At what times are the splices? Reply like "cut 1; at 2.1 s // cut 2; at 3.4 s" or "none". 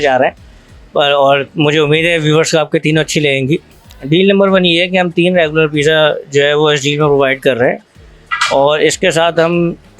cut 1; at 3.9 s